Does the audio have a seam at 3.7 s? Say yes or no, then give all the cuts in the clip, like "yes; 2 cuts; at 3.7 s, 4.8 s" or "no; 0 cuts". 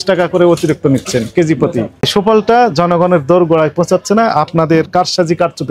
no; 1 cut; at 2.1 s